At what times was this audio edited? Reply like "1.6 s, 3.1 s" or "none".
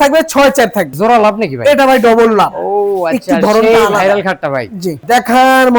0.9 s, 5.0 s